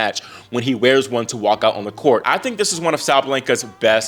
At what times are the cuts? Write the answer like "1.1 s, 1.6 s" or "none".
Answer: 2.2 s